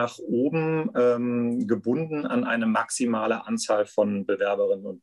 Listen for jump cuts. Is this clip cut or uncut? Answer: uncut